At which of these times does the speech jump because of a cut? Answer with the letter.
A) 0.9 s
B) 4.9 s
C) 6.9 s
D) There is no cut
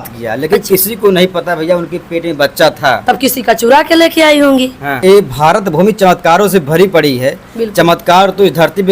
B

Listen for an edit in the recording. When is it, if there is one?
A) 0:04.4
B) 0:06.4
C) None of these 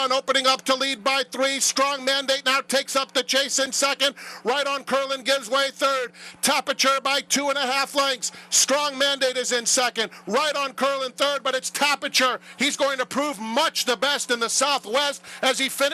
C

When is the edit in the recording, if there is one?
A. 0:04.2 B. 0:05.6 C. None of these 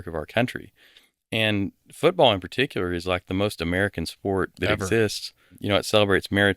B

